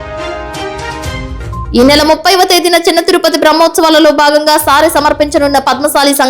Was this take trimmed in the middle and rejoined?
yes; 1 cut; at 1.0 s

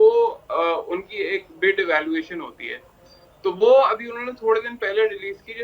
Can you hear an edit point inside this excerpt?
no; 0 cuts

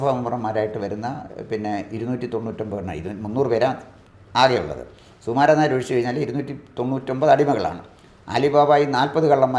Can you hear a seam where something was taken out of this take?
no; 0 cuts

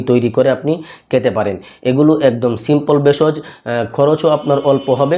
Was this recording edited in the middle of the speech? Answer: no; 0 cuts

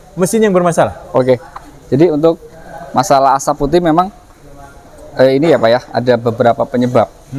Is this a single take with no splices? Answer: yes; 0 cuts

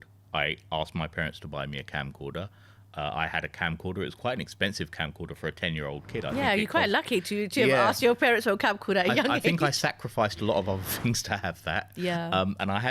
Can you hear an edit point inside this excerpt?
no; 0 cuts

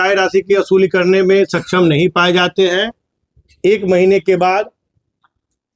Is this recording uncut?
yes; 0 cuts

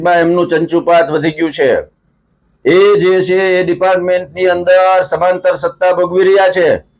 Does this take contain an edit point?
no; 0 cuts

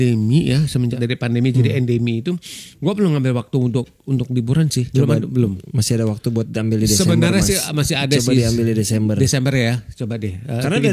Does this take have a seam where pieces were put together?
yes; 2 cuts; at 1.0 s, 4.9 s

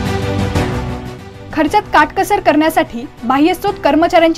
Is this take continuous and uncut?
no; 1 cut; at 1.2 s

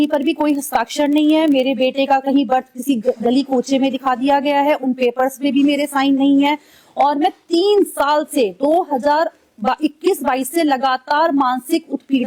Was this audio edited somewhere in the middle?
no; 0 cuts

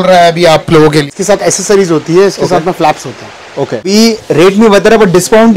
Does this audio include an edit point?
yes; 2 cuts; at 1.2 s, 3.9 s

